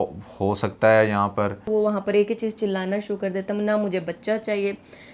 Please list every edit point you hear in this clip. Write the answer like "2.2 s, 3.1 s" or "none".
1.7 s